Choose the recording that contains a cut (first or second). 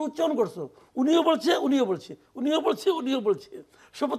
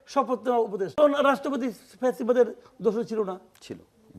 second